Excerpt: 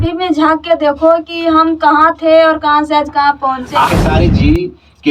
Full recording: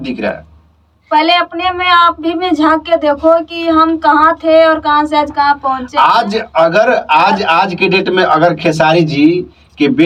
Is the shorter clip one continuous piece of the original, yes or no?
no